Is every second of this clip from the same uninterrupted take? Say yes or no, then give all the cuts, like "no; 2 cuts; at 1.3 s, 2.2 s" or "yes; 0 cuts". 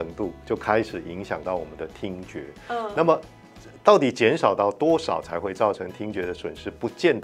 yes; 0 cuts